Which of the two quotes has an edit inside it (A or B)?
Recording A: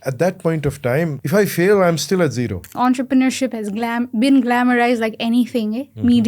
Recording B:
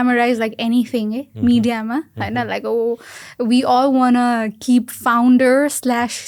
A